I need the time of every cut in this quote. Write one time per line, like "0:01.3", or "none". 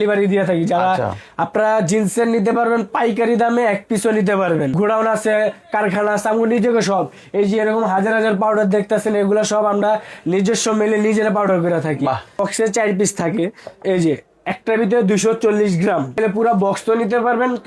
0:04.7
0:12.4
0:16.2